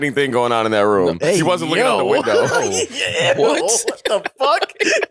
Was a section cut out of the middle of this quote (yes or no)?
no